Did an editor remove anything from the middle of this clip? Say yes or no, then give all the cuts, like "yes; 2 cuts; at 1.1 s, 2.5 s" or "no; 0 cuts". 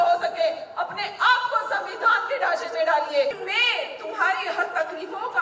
yes; 1 cut; at 3.4 s